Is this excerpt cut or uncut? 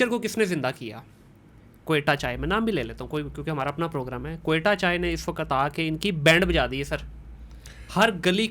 uncut